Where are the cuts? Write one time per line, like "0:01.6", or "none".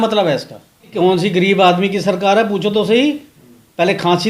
0:00.9